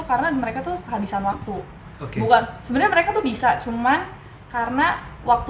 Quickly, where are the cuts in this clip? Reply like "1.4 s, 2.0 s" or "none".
none